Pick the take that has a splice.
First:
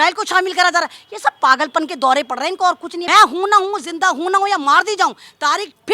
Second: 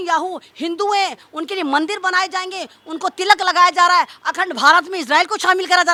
first; 1 cut; at 2.9 s

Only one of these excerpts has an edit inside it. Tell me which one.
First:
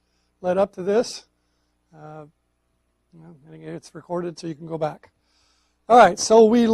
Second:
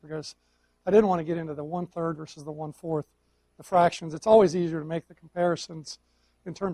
second; 1 cut; at 1.7 s

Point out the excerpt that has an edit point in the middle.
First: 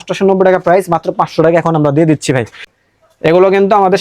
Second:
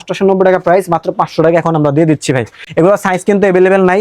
first; 1 cut; at 2.6 s

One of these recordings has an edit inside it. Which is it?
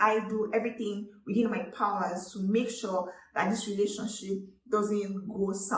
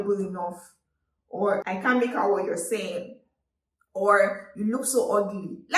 second; 1 cut; at 1.6 s

